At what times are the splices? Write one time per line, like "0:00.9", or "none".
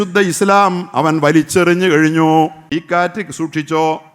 0:02.7